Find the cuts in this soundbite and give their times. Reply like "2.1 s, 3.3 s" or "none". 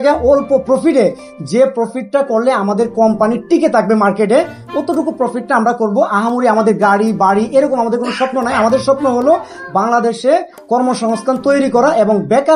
none